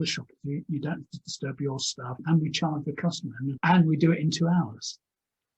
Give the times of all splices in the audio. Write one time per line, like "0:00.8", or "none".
0:02.2
0:03.6